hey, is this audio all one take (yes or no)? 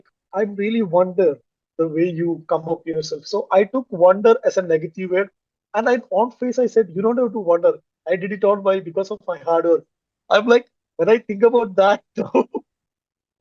yes